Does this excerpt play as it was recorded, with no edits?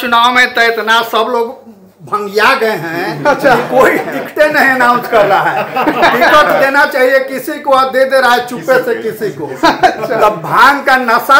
yes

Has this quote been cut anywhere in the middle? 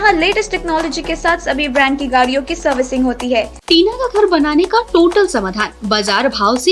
yes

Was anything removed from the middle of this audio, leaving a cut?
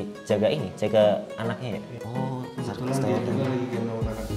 yes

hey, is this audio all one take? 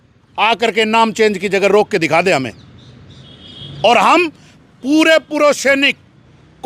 yes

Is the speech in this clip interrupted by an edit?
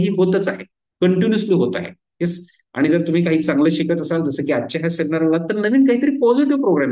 no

